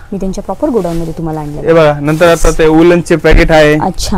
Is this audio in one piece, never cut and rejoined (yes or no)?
yes